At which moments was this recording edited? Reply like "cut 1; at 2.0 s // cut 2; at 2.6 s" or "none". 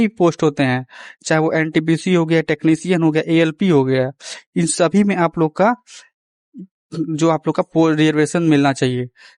none